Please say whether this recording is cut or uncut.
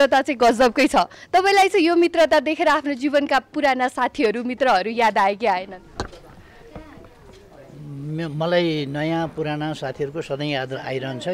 uncut